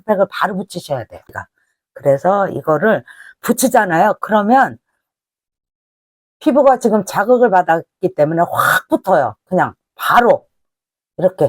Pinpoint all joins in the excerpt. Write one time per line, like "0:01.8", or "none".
0:01.5